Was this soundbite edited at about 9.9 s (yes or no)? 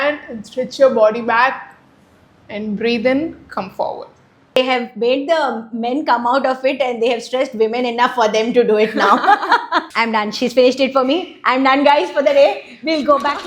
yes